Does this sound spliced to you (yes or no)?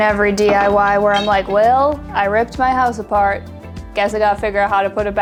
no